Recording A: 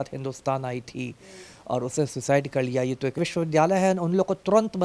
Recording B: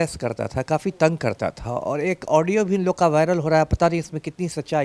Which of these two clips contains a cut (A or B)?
A